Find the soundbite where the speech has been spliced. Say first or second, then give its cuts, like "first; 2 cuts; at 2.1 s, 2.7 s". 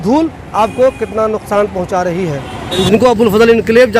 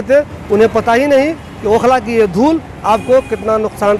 first; 1 cut; at 2.7 s